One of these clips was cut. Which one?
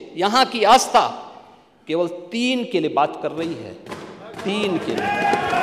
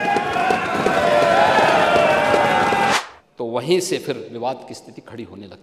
second; 1 cut; at 2.9 s

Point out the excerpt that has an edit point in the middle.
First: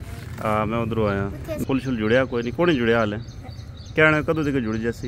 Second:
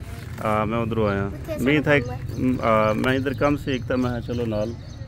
first; 1 cut; at 1.6 s

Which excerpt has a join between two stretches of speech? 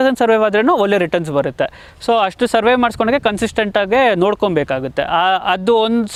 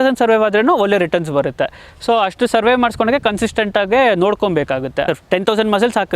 second; 1 cut; at 5.0 s

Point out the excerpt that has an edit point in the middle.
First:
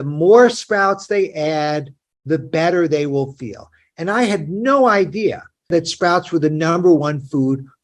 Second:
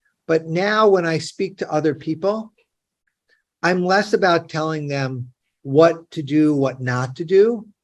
first; 1 cut; at 5.7 s

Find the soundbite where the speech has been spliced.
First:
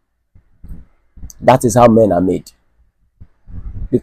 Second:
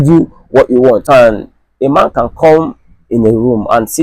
second; 1 cut; at 1.0 s

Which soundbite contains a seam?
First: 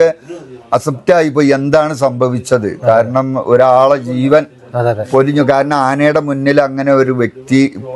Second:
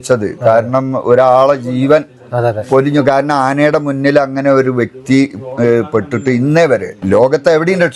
second; 1 cut; at 7.0 s

